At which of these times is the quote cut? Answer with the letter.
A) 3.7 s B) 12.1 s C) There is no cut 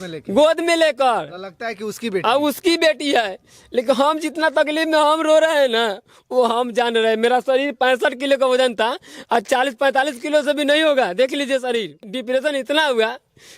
B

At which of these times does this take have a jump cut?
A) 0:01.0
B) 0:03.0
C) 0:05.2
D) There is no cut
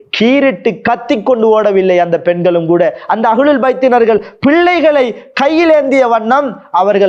D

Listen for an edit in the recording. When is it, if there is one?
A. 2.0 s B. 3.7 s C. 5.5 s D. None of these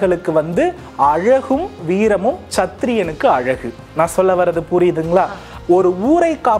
C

